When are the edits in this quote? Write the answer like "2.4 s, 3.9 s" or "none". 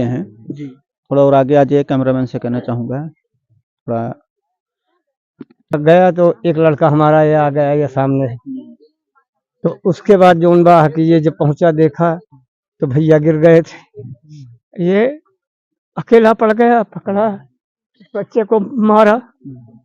5.7 s